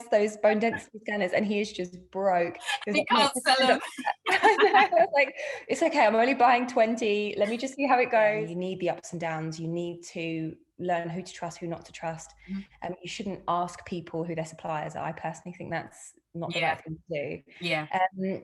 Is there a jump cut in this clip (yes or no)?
yes